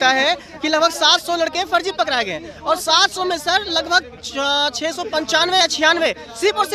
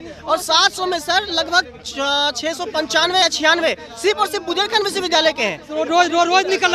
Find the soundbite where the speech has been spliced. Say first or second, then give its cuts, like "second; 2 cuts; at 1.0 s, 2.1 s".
second; 1 cut; at 5.7 s